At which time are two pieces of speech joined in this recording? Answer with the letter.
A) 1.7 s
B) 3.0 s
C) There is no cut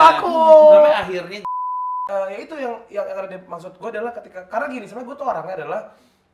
A